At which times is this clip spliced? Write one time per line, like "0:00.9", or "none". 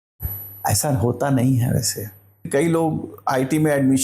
0:02.5